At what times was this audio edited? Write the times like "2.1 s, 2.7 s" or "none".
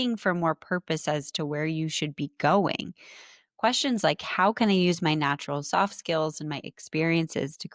none